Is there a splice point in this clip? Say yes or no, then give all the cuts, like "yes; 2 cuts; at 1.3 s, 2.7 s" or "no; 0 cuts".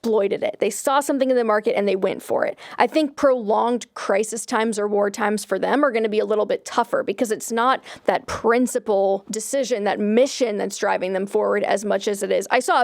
yes; 1 cut; at 9.3 s